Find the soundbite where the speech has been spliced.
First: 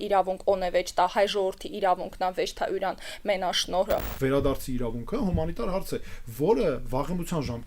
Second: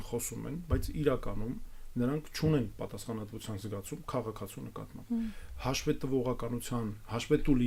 first; 1 cut; at 4.1 s

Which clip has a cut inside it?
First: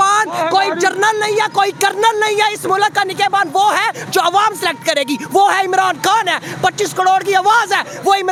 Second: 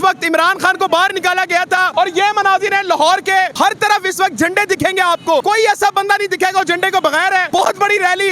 second; 4 cuts; at 1.9 s, 3.5 s, 5.4 s, 7.5 s

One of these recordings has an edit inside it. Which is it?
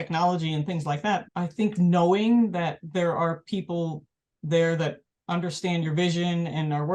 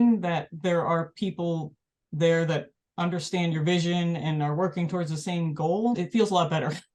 first; 1 cut; at 1.3 s

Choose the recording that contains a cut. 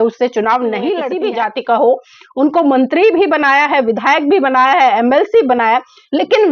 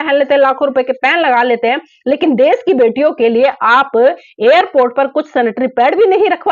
first; 1 cut; at 1.1 s

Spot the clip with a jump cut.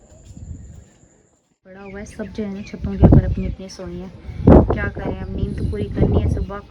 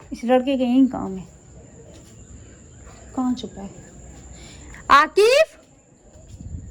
first; 1 cut; at 1.8 s

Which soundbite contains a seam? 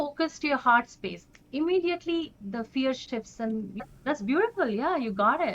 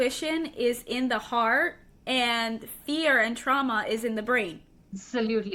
first; 1 cut; at 3.7 s

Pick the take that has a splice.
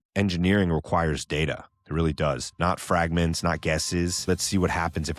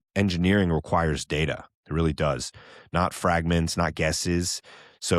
first; 2 cuts; at 2.5 s, 4.3 s

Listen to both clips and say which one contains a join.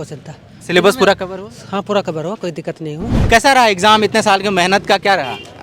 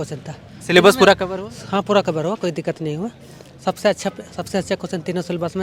first; 1 cut; at 3.2 s

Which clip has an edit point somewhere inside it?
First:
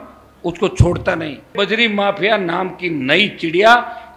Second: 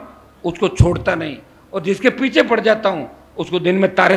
first; 1 cut; at 1.5 s

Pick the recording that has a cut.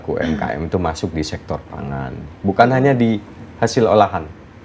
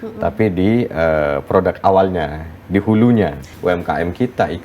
second; 1 cut; at 3.5 s

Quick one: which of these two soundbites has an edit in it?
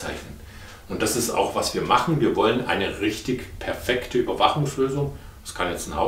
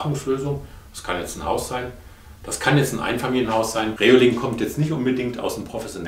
second; 1 cut; at 3.9 s

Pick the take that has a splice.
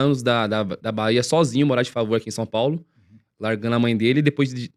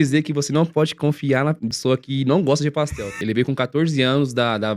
second; 2 cuts; at 1.7 s, 3.2 s

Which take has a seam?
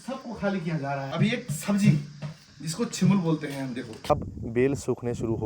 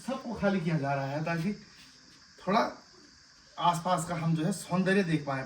first; 2 cuts; at 1.1 s, 4.0 s

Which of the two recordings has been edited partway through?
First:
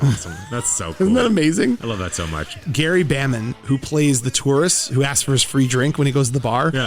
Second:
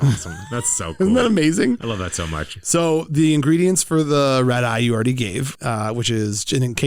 first; 1 cut; at 2.6 s

